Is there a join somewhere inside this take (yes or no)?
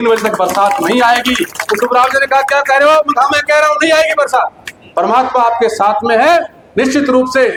no